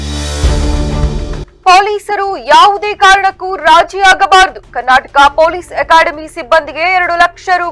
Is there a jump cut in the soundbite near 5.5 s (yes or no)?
no